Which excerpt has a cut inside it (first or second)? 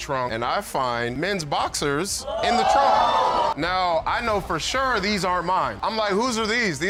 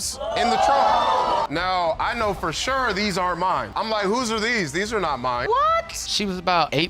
second